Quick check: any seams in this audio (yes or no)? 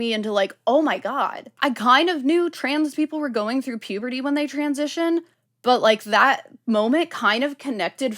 yes